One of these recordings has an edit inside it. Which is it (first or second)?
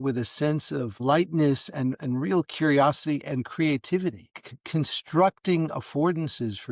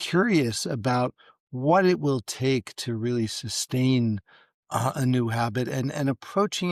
first